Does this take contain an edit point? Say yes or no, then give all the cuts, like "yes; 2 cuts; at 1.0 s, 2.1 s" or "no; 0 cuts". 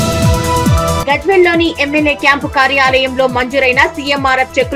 yes; 1 cut; at 1.0 s